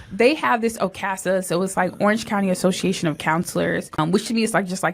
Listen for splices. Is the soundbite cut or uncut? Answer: cut